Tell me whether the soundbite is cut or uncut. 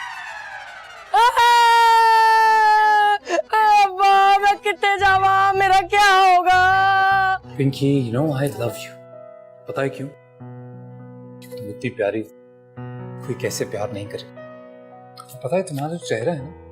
cut